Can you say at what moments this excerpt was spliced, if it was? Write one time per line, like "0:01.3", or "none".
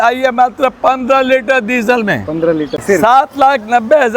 0:02.8